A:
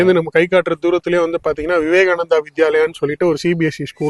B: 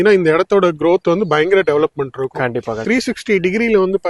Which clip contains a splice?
B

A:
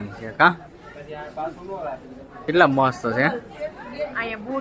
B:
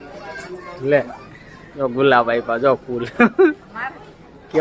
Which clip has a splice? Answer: A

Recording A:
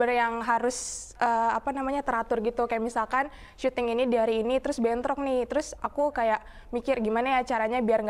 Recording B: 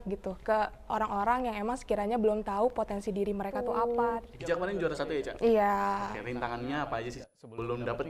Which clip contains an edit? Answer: B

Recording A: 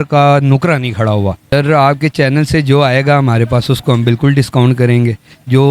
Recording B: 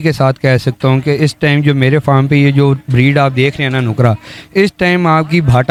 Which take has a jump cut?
A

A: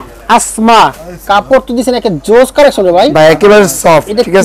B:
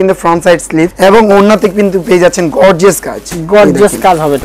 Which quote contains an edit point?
B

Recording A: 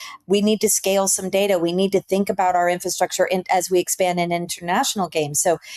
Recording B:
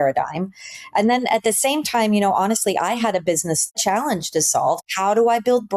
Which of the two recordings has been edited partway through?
B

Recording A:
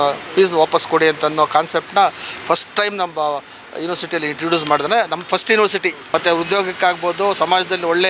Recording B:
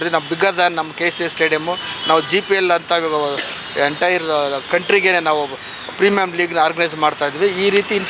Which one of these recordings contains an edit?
A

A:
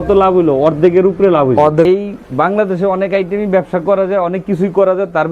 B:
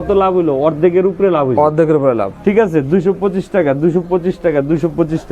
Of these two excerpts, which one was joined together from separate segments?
A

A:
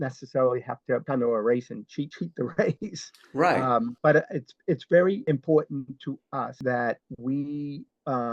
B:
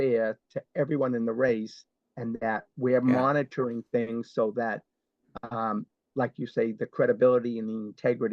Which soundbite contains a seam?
A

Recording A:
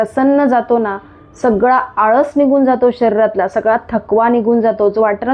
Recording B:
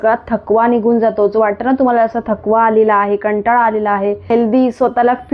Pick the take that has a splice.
B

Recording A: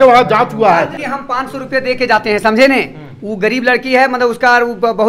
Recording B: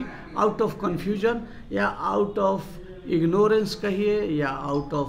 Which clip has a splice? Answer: A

